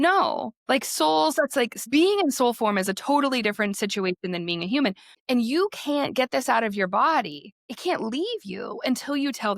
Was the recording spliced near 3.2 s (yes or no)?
no